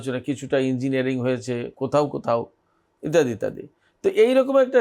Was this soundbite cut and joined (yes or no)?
no